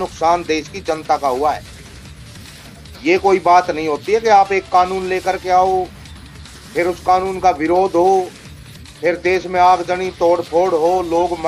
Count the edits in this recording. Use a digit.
2